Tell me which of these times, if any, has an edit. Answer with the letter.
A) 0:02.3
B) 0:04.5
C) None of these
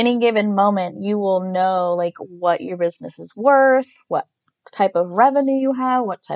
C